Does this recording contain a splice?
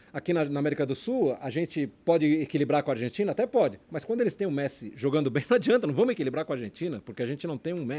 no; 0 cuts

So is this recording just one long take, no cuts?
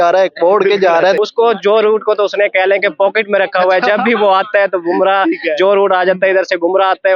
no; 1 cut; at 1.2 s

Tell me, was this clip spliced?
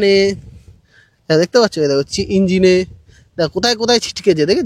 no; 0 cuts

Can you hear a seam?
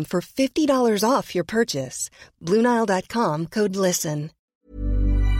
yes; 1 cut; at 4.4 s

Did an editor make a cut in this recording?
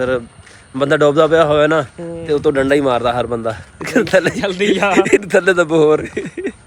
no; 0 cuts

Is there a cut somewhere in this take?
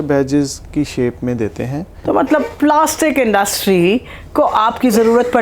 yes; 1 cut; at 1.9 s

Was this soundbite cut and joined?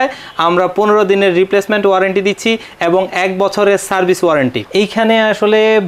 yes; 1 cut; at 4.6 s

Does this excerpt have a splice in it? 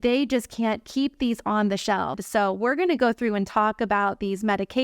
yes; 1 cut; at 2.2 s

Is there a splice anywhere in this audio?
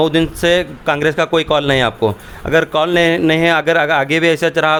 no; 0 cuts

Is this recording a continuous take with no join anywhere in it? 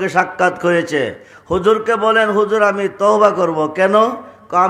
yes; 0 cuts

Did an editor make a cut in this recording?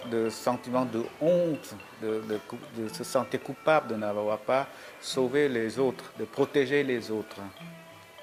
no; 0 cuts

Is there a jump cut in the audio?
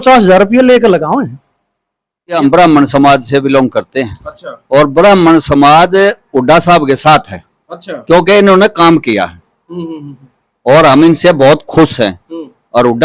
yes; 1 cut; at 2.4 s

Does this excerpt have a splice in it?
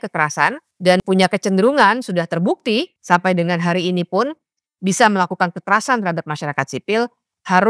yes; 2 cuts; at 1.0 s, 3.0 s

